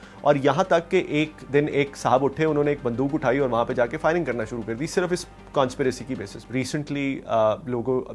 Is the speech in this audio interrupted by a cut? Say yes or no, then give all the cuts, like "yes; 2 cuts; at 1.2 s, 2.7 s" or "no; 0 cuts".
yes; 1 cut; at 6.4 s